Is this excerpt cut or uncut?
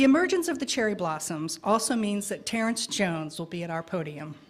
cut